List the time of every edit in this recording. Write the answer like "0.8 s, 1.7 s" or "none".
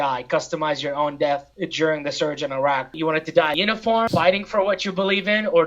1.6 s, 2.9 s

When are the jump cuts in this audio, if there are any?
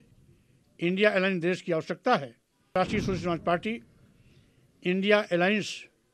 2.7 s

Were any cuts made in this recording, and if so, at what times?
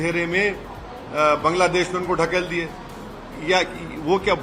none

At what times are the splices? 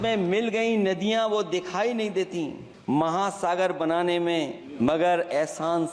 2.7 s, 4.6 s

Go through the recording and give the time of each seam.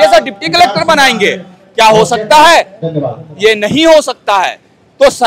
none

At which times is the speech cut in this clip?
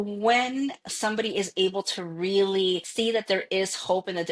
2.9 s

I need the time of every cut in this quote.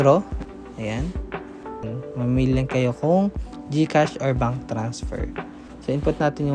1.8 s

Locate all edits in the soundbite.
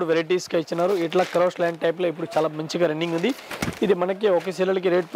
none

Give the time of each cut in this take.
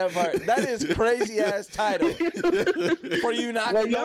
none

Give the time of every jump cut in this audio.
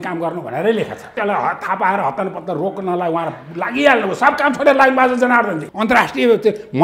1.1 s, 5.6 s

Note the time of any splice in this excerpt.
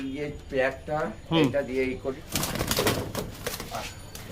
2.1 s

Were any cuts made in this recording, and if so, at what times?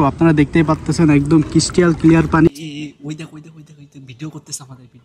2.5 s

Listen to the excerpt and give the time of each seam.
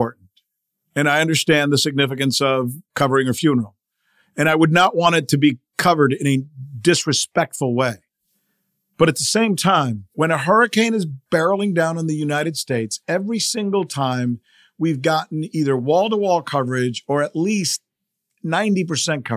10.0 s

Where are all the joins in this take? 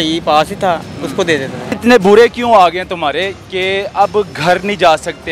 1.7 s

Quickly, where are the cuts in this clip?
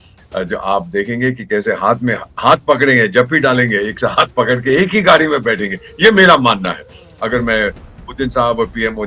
none

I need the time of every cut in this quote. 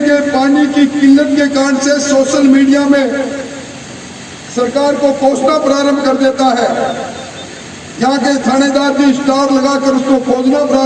none

